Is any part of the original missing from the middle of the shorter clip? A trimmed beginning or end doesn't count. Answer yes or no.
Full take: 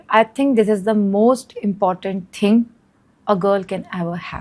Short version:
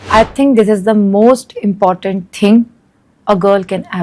no